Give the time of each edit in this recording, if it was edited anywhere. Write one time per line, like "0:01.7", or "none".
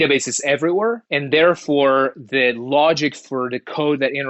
0:01.1